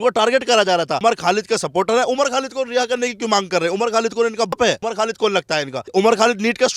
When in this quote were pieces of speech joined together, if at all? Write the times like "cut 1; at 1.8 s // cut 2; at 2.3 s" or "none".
cut 1; at 0.9 s // cut 2; at 4.5 s // cut 3; at 5.8 s